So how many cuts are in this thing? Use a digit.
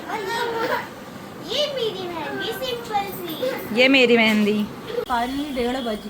1